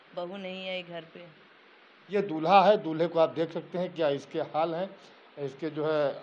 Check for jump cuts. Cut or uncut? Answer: cut